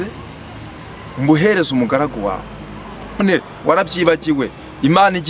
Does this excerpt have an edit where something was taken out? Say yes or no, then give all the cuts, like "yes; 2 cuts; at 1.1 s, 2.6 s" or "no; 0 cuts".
yes; 1 cut; at 3.2 s